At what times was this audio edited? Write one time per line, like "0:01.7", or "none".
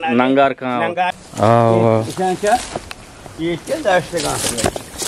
0:00.9